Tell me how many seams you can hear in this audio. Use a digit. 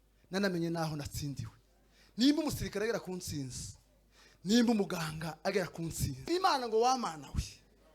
1